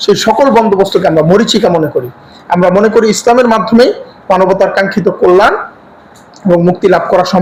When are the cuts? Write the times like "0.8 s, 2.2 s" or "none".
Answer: none